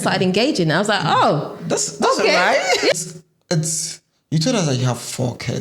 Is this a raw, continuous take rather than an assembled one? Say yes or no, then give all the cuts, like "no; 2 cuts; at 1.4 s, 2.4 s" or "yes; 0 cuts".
no; 1 cut; at 2.9 s